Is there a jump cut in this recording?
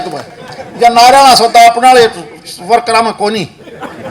no; 0 cuts

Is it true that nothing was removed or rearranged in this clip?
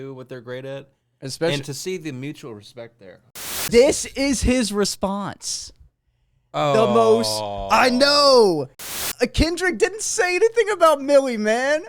no; 2 cuts; at 3.5 s, 8.7 s

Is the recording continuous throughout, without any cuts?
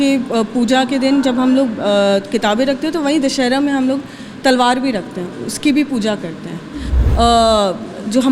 no; 1 cut; at 6.8 s

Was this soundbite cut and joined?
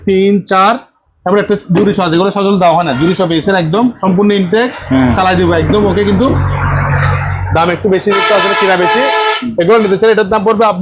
no; 0 cuts

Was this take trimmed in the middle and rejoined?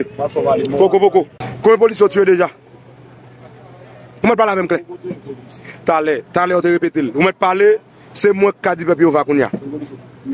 yes; 1 cut; at 1.4 s

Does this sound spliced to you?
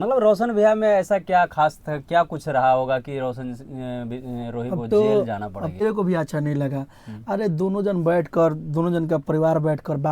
yes; 1 cut; at 5.8 s

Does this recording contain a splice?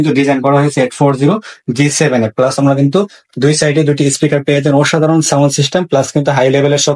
no; 0 cuts

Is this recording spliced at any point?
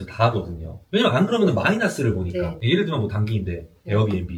no; 0 cuts

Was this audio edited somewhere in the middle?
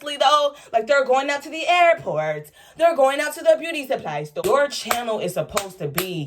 yes; 1 cut; at 4.3 s

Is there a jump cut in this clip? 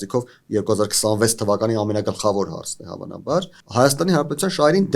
yes; 1 cut; at 3.6 s

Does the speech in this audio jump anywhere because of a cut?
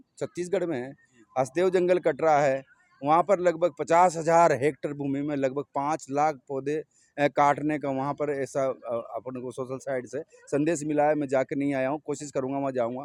no; 0 cuts

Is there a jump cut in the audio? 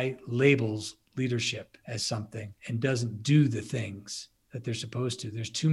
yes; 2 cuts; at 1.8 s, 2.5 s

